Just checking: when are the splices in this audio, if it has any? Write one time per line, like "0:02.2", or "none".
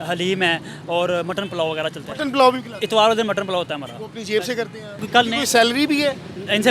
0:05.0